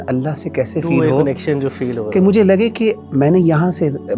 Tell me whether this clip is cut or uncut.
uncut